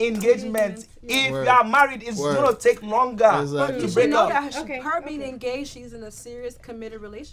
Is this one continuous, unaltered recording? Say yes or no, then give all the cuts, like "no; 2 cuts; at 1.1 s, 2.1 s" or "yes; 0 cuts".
yes; 0 cuts